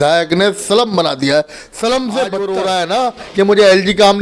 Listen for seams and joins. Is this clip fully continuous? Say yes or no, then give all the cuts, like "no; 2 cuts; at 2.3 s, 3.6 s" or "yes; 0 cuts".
no; 1 cut; at 2.4 s